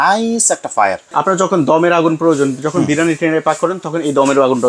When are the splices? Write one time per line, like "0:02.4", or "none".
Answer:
0:01.1